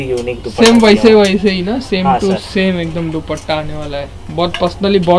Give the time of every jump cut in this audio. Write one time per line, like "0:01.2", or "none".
none